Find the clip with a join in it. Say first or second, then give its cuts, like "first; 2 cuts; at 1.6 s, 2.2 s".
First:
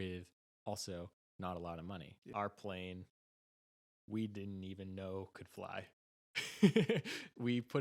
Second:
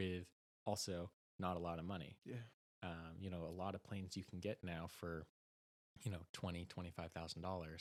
first; 1 cut; at 2.2 s